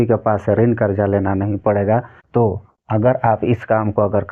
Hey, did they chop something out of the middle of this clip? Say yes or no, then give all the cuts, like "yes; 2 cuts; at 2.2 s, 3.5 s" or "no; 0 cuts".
yes; 1 cut; at 2.4 s